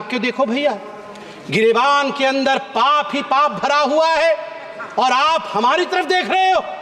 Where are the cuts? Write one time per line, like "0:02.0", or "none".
none